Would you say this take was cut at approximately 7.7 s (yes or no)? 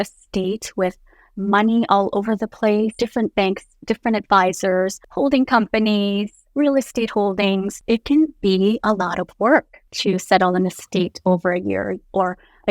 yes